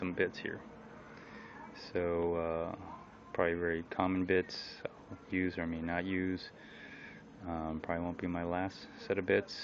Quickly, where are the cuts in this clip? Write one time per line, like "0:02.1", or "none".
none